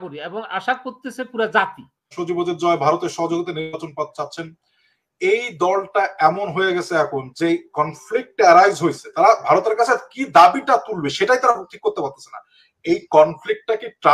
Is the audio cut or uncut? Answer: cut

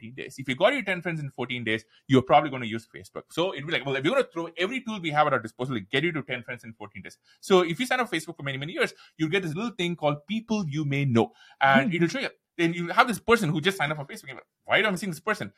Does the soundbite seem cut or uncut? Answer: uncut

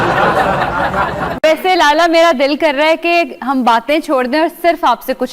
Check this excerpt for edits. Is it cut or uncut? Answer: cut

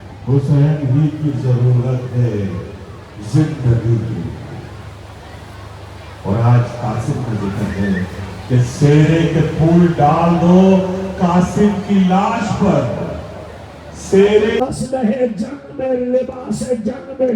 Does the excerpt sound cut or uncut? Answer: cut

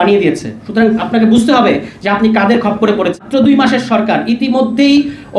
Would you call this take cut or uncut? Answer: cut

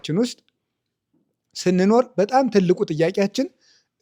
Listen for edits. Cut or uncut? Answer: uncut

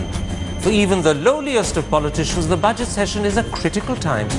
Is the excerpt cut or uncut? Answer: uncut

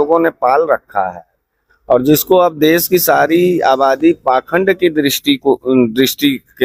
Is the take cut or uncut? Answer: uncut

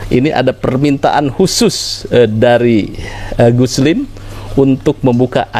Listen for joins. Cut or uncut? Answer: uncut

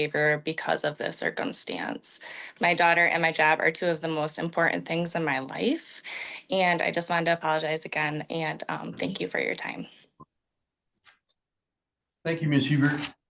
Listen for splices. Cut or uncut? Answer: uncut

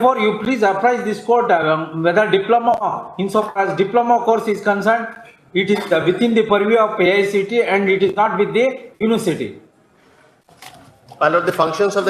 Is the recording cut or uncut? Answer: uncut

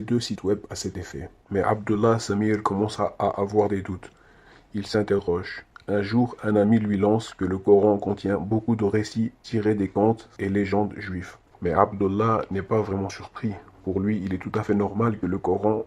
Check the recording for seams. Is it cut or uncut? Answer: uncut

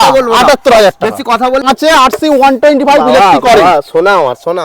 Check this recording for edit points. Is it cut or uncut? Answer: cut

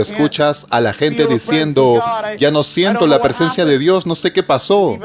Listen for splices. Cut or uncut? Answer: uncut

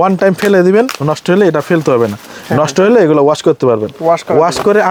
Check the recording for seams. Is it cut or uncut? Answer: uncut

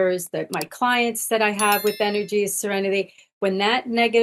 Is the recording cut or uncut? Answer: uncut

